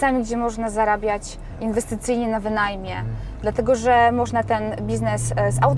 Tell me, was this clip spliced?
no; 0 cuts

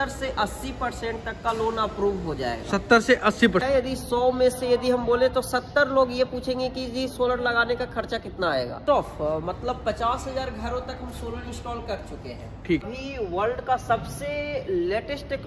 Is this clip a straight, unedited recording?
no; 3 cuts; at 3.6 s, 8.8 s, 12.9 s

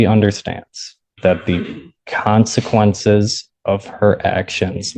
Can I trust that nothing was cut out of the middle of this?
yes; 0 cuts

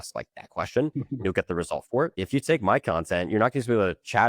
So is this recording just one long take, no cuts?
no; 1 cut; at 2.2 s

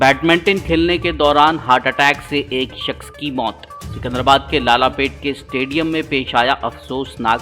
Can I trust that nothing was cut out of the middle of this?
yes; 0 cuts

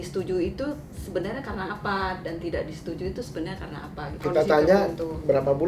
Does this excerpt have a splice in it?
yes; 1 cut; at 4.2 s

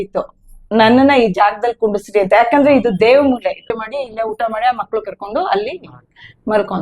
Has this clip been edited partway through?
yes; 1 cut; at 3.9 s

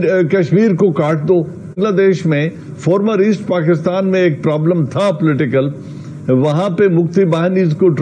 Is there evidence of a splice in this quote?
yes; 1 cut; at 1.7 s

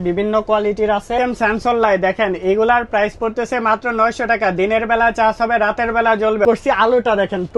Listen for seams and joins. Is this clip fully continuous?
no; 2 cuts; at 1.1 s, 6.5 s

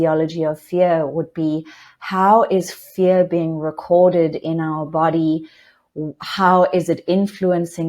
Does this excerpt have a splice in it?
no; 0 cuts

